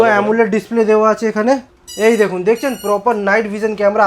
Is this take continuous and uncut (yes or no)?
no